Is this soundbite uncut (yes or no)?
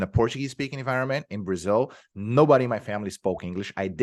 yes